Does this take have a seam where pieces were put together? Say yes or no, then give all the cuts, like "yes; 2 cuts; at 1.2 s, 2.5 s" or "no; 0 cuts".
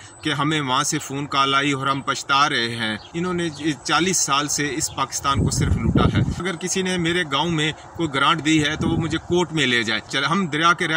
yes; 3 cuts; at 3.1 s, 6.4 s, 10.2 s